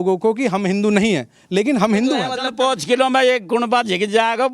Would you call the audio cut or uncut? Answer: cut